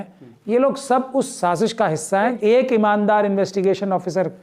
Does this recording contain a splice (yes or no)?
yes